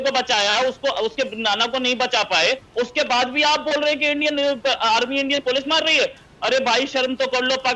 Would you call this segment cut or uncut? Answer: cut